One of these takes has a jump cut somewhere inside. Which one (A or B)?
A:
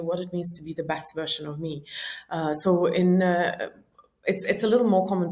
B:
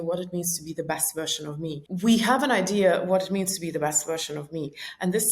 B